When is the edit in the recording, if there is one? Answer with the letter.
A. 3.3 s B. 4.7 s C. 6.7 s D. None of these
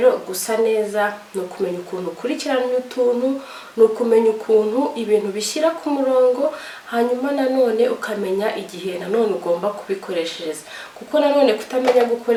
D